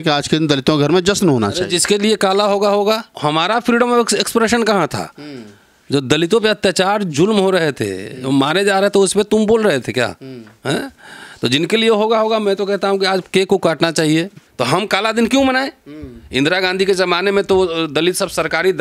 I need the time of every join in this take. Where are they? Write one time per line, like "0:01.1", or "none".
0:03.2
0:14.4

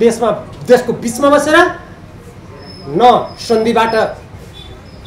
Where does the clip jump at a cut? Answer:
none

